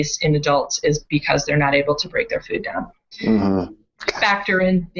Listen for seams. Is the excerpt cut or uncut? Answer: uncut